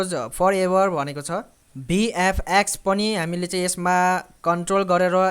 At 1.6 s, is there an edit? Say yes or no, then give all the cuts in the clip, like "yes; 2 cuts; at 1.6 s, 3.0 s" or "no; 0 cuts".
yes; 1 cut; at 1.6 s